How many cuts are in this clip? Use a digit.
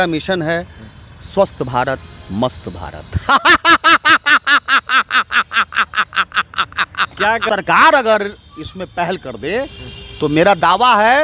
1